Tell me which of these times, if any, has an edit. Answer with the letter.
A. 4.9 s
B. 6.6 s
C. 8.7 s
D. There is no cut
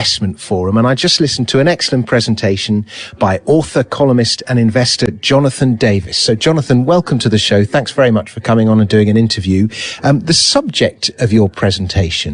A